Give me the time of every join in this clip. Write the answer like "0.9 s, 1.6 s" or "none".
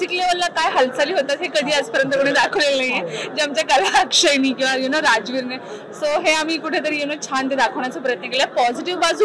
none

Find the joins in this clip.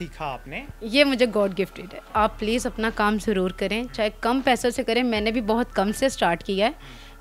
2.1 s

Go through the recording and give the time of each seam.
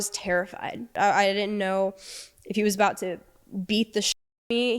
0.9 s

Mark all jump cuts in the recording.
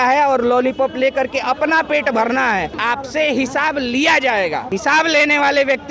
2.8 s, 4.7 s

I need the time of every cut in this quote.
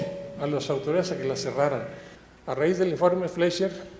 1.2 s

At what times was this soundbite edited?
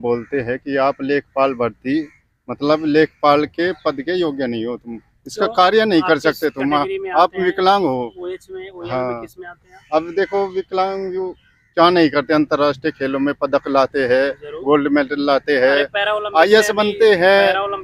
none

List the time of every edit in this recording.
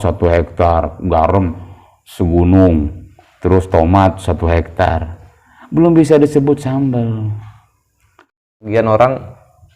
8.5 s

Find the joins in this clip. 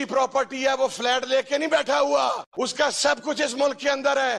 2.5 s

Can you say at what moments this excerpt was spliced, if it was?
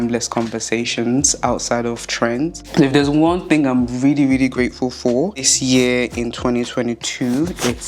2.6 s, 5.5 s

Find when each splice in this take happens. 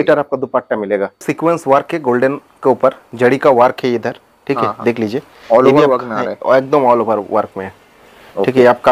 1.2 s

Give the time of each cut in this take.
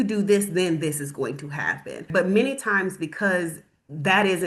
2.1 s

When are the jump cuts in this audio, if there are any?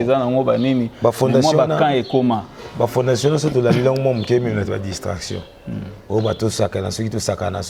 none

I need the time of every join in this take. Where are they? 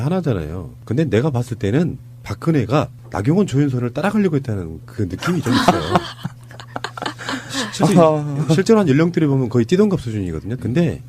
9.1 s

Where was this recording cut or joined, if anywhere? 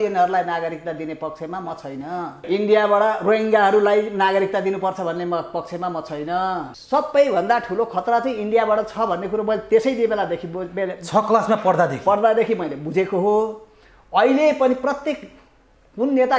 2.4 s, 6.8 s

